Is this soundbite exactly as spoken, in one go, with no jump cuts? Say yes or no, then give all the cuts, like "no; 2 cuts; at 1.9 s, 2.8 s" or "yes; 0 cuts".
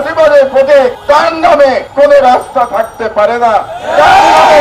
no; 2 cuts; at 1.0 s, 1.8 s